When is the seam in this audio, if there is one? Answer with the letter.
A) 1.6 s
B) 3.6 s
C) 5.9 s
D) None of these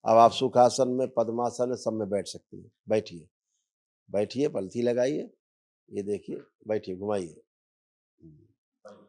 D